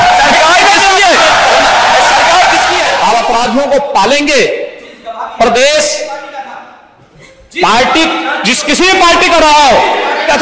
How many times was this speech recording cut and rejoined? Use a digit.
1